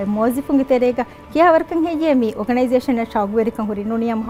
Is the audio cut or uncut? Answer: uncut